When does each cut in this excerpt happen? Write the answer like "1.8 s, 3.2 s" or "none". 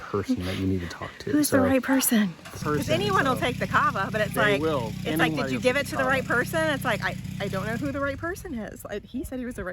none

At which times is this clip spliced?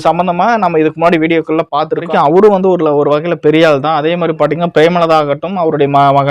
2.1 s

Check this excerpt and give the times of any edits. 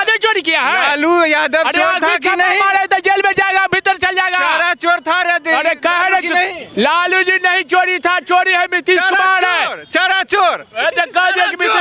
none

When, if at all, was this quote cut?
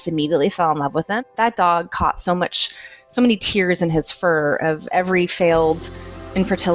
1.2 s

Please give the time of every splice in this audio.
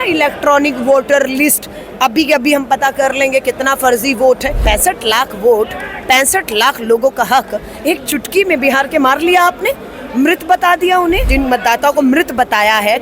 4.5 s, 11.3 s

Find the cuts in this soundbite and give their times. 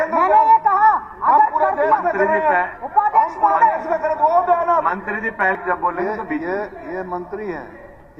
5.6 s

